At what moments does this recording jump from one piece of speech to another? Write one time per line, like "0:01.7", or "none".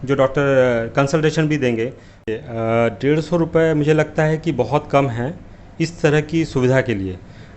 0:02.3